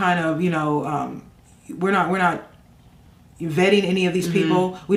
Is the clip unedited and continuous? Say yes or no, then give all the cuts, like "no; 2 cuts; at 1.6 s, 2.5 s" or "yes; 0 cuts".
yes; 0 cuts